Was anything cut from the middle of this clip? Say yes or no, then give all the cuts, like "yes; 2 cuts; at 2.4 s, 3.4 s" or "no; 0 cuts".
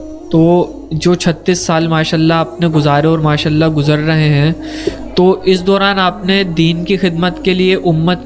no; 0 cuts